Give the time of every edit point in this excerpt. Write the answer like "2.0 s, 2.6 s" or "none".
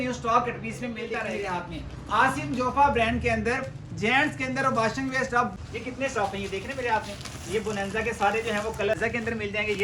1.1 s, 5.5 s, 9.0 s